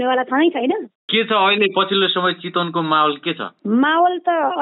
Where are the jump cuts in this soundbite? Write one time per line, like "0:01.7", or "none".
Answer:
0:01.0